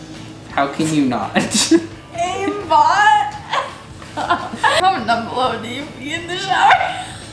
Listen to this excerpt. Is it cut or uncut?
uncut